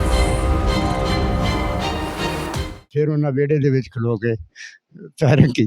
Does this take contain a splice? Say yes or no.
yes